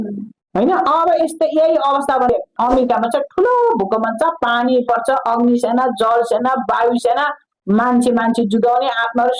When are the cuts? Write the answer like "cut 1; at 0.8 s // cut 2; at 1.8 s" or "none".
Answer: cut 1; at 2.3 s